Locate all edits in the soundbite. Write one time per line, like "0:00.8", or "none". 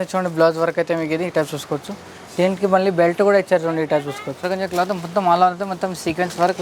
0:04.5